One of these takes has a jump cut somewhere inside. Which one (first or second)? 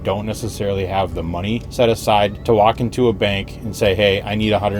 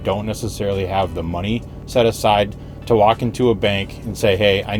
first